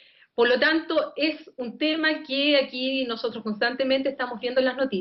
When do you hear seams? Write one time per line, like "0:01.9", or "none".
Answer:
0:01.7

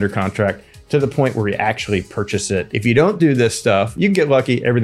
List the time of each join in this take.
0:02.7
0:03.9

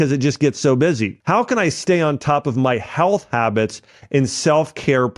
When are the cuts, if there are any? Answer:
0:01.1

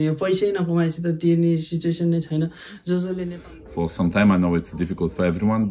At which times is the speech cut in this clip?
0:03.2

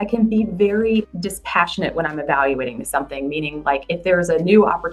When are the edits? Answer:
0:01.1

